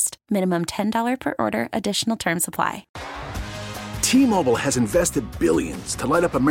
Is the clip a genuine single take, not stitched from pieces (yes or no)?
no